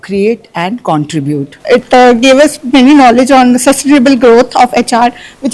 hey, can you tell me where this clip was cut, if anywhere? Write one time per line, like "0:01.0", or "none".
0:01.5